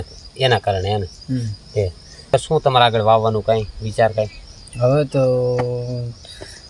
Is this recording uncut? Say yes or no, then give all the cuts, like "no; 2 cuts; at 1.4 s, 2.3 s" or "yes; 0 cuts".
no; 1 cut; at 2.3 s